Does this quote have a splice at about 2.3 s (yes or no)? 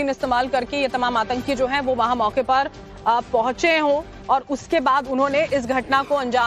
no